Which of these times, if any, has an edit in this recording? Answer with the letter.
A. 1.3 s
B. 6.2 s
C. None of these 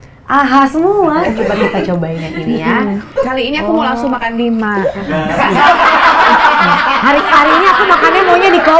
A